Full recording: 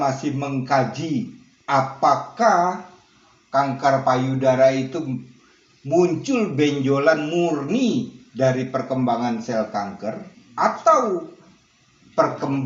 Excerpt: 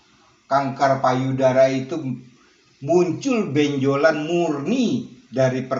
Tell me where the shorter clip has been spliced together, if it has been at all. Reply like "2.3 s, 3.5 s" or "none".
none